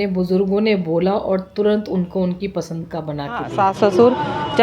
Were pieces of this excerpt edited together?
yes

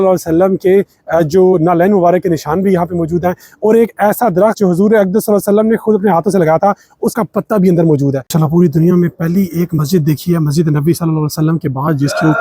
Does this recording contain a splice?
yes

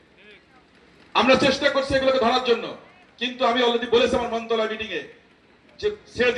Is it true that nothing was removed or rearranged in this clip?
yes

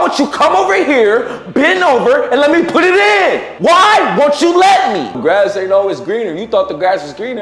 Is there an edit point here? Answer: yes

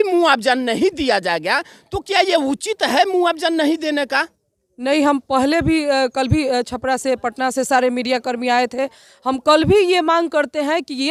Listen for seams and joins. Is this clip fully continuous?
yes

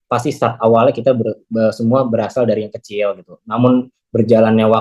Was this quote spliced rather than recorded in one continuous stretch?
no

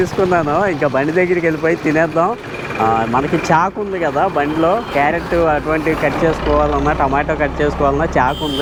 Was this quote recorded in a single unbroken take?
yes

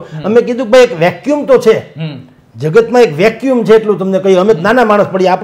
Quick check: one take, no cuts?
yes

